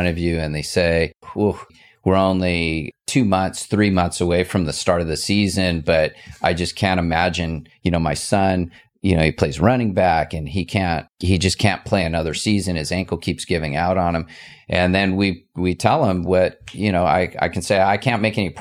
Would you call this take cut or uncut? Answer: cut